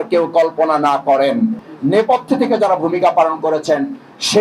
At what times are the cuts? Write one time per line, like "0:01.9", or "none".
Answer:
0:01.5